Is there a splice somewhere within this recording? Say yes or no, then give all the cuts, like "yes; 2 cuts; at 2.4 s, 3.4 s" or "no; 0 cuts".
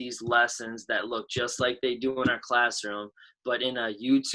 no; 0 cuts